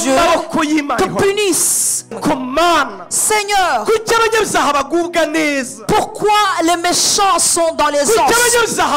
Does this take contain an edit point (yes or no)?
yes